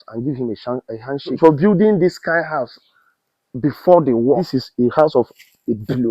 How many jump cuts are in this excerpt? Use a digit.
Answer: 2